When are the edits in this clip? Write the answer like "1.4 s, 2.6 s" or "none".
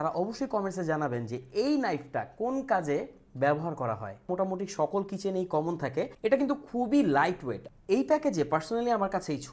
4.3 s, 6.1 s, 7.7 s